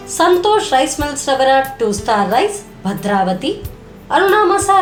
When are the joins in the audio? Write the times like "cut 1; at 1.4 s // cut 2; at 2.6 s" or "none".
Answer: none